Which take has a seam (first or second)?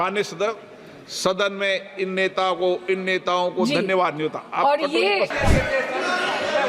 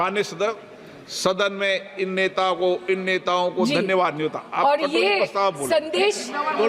first